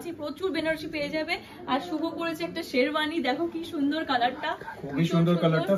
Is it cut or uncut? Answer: uncut